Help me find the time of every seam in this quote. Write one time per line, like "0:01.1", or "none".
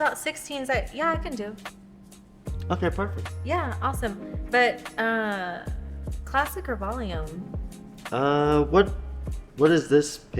0:03.3